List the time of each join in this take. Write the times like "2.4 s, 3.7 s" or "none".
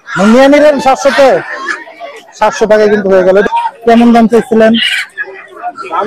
3.4 s